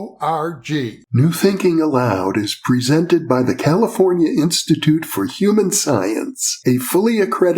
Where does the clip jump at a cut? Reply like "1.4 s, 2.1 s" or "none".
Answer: 1.0 s

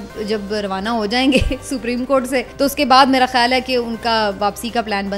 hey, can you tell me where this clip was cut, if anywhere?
2.5 s

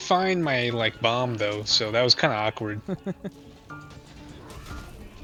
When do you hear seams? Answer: none

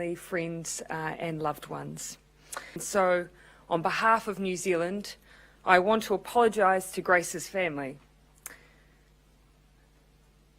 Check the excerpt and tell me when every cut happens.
2.8 s

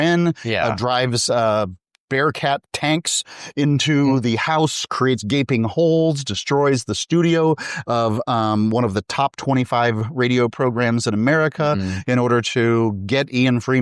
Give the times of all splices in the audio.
none

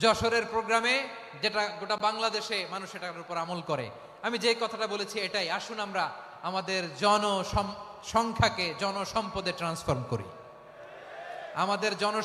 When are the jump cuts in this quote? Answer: none

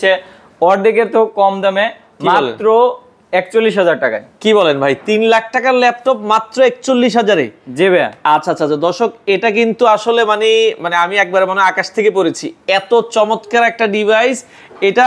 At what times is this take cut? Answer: none

